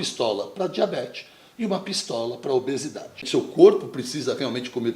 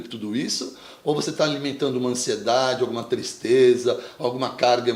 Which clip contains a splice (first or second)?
first